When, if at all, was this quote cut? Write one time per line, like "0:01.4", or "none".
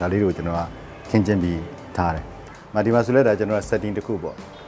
0:02.4